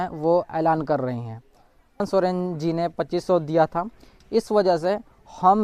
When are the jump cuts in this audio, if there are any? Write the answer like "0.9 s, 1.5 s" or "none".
1.9 s